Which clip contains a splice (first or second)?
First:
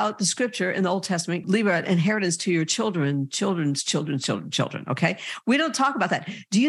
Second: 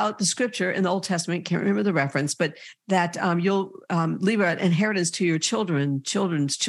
first